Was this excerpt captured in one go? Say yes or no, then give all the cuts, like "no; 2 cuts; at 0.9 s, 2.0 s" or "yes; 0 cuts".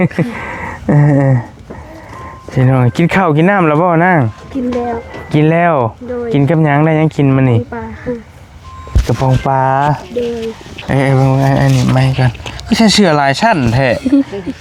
yes; 0 cuts